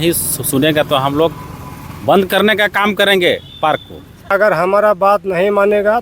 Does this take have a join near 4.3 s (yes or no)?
yes